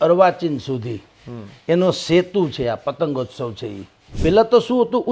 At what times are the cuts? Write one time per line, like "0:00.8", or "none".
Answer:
0:04.2